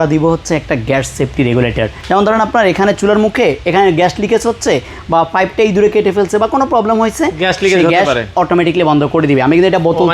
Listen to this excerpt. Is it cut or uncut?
cut